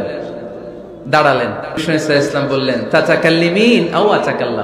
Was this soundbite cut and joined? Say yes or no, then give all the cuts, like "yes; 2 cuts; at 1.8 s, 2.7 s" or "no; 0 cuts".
yes; 1 cut; at 1.8 s